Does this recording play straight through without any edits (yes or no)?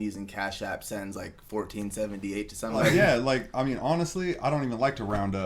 no